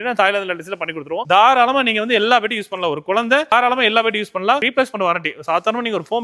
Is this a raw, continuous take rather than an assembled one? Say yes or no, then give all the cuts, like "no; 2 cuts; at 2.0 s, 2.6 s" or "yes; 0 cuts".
no; 2 cuts; at 1.2 s, 4.6 s